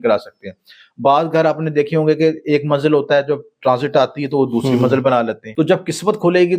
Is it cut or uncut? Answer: cut